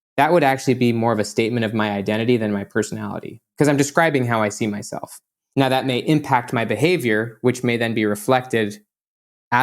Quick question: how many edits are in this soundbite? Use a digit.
1